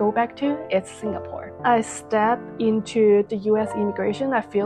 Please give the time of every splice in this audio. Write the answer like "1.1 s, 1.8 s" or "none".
1.6 s, 3.3 s